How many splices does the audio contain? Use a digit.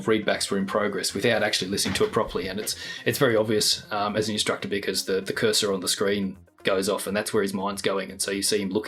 0